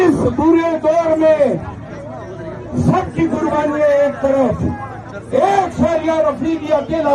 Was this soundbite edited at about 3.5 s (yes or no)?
no